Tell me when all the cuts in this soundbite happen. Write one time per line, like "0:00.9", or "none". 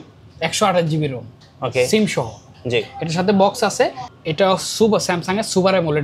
0:04.1